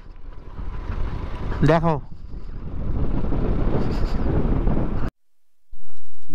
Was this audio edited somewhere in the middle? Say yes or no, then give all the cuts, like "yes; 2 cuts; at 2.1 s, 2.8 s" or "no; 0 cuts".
yes; 1 cut; at 5.1 s